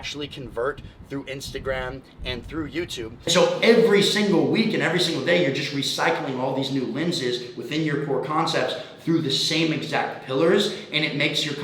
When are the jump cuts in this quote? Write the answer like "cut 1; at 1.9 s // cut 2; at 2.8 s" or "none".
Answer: cut 1; at 3.3 s